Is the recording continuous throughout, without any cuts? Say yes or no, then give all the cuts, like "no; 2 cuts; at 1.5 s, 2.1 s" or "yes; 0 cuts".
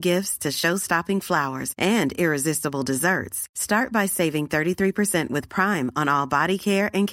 yes; 0 cuts